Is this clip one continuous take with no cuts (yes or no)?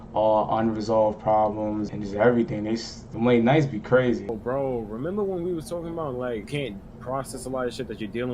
no